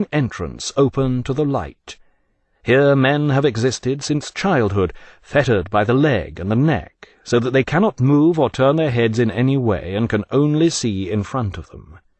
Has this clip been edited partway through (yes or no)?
yes